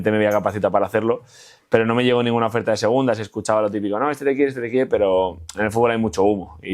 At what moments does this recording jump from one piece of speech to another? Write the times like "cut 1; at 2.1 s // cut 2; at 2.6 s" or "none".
none